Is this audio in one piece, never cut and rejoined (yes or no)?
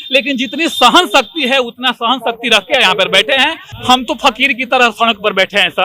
no